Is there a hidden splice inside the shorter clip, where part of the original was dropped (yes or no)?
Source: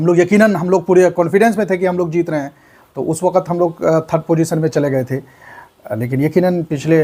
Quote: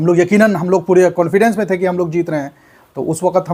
no